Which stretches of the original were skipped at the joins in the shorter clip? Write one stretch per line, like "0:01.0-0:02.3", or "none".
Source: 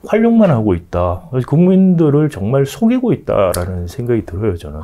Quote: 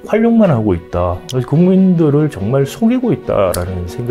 none